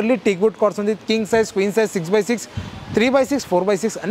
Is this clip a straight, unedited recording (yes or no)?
yes